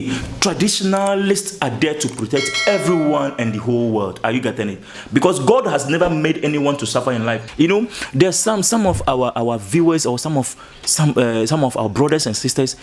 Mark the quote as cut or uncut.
cut